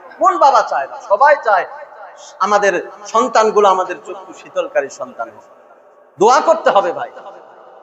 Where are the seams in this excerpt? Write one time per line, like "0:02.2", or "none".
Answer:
none